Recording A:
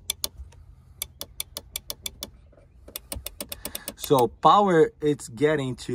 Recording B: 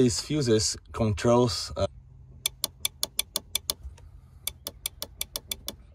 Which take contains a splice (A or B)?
B